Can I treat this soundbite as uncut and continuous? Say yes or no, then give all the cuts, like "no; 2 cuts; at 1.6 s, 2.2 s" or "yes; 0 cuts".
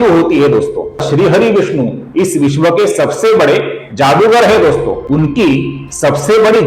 no; 1 cut; at 1.0 s